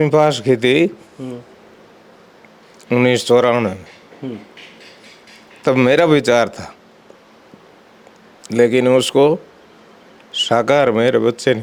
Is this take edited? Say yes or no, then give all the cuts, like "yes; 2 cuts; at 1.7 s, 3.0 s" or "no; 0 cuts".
no; 0 cuts